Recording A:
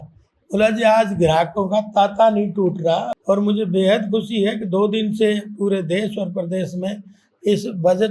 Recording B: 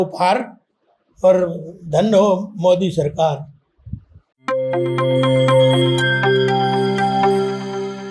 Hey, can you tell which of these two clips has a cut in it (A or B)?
A